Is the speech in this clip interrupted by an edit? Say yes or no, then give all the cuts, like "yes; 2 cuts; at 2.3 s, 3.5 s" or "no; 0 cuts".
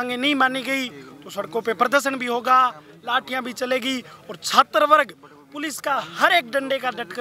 no; 0 cuts